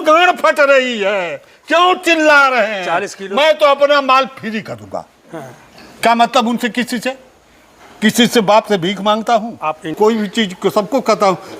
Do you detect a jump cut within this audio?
yes; 1 cut; at 9.9 s

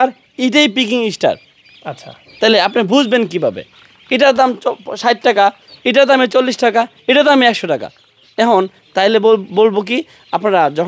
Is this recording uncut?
yes; 0 cuts

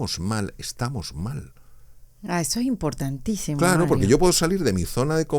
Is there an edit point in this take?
no; 0 cuts

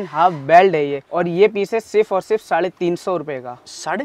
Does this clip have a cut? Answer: yes; 1 cut; at 1.0 s

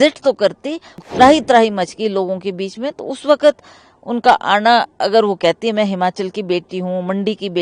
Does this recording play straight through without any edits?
no; 1 cut; at 1.0 s

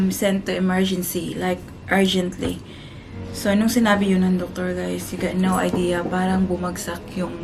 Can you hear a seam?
no; 0 cuts

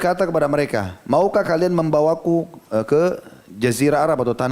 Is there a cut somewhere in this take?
yes; 1 cut; at 2.6 s

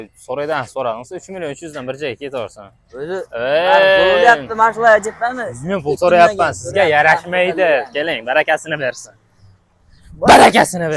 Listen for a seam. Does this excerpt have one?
no; 0 cuts

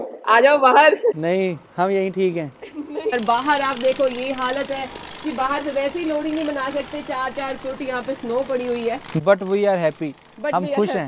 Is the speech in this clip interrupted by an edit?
yes; 1 cut; at 3.1 s

